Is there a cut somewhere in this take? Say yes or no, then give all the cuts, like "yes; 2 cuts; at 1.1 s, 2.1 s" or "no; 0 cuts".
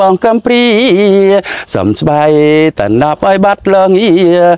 no; 0 cuts